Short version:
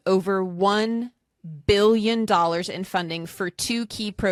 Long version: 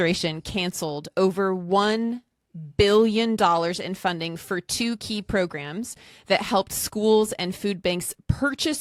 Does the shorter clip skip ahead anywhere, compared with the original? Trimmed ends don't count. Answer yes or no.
no